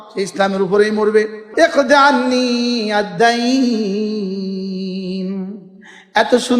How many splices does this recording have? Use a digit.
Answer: 1